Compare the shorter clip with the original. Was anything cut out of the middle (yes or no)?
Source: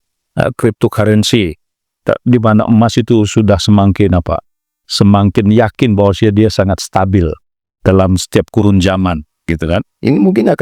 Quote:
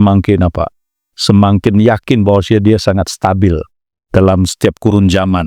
no